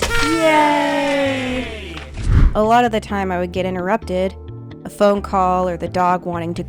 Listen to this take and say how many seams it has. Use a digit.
1